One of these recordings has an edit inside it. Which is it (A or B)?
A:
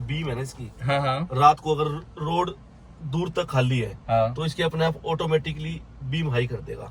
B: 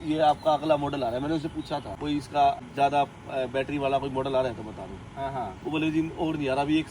B